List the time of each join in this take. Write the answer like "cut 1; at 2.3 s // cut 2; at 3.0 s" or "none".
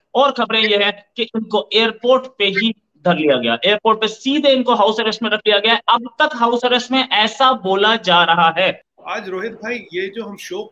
none